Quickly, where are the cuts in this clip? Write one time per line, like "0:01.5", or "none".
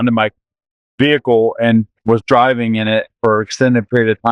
0:02.0